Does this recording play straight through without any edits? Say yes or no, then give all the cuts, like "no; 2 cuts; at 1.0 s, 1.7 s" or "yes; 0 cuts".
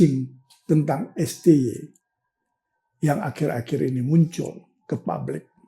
yes; 0 cuts